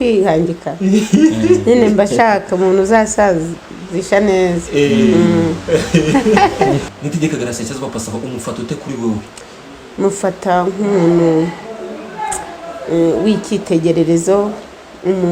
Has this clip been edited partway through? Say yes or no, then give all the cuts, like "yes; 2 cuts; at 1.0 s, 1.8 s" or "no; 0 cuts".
yes; 1 cut; at 6.8 s